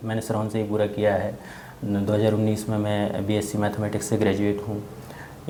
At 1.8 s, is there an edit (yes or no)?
no